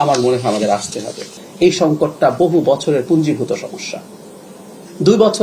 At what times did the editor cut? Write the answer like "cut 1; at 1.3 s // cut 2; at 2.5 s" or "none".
cut 1; at 1.4 s

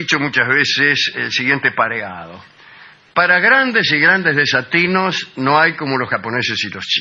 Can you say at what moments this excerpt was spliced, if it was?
cut 1; at 3.4 s

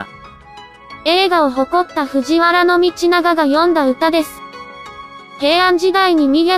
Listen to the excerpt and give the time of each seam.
cut 1; at 1.8 s

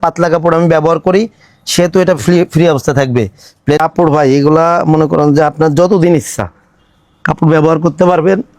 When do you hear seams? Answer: cut 1; at 3.8 s

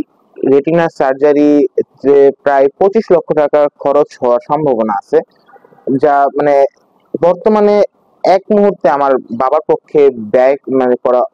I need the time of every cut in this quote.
none

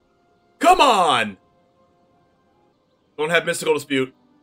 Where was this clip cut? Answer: cut 1; at 2.7 s

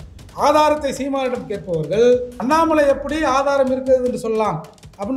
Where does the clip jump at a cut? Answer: cut 1; at 2.3 s

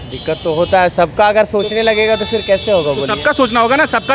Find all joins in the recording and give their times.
none

